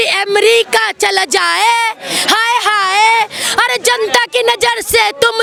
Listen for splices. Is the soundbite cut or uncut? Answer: uncut